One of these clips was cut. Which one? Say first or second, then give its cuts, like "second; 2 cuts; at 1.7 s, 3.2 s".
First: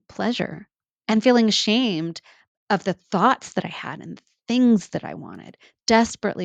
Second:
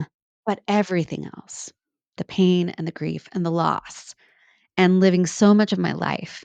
second; 1 cut; at 2.2 s